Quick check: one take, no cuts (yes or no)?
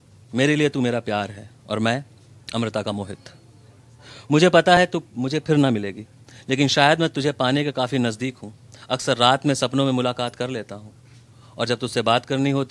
yes